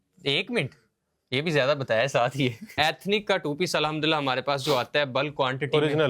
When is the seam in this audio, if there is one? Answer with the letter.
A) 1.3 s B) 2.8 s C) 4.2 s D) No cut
B